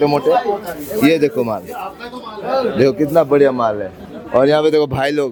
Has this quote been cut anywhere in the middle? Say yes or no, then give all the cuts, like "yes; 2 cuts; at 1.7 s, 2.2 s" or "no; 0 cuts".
no; 0 cuts